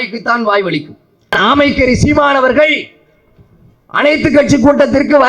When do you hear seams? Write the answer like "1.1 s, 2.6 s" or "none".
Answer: 1.3 s